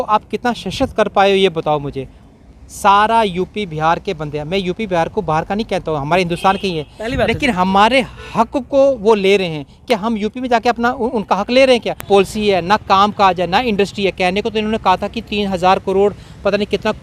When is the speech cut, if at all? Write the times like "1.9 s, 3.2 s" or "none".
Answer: 12.0 s